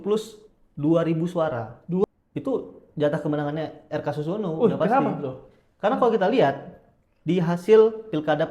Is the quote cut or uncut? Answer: cut